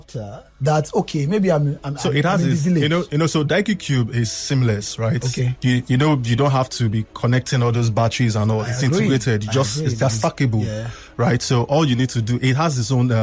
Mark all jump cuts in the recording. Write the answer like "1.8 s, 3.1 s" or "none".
none